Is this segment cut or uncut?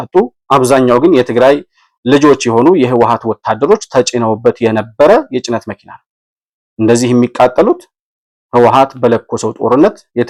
uncut